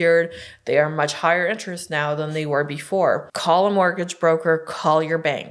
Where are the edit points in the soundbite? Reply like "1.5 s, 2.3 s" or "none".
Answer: 3.3 s